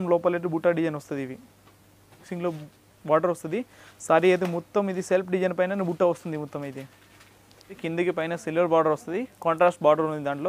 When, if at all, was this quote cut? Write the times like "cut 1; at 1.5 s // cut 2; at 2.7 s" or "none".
cut 1; at 2.2 s // cut 2; at 7.8 s